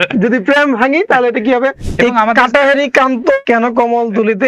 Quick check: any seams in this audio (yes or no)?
yes